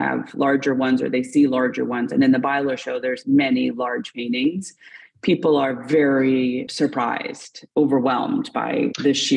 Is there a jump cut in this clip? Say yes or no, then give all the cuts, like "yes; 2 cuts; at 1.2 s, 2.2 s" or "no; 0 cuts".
yes; 1 cut; at 7.7 s